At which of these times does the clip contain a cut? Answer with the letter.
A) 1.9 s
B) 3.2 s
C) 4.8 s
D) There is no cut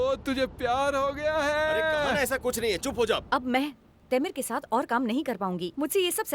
B